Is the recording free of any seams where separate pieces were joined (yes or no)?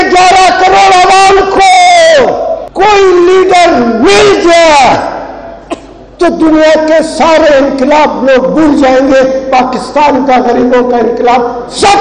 no